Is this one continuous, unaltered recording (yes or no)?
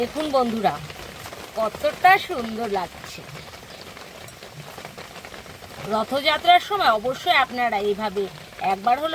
yes